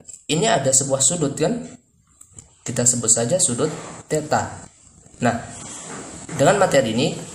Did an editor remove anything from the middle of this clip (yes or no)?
no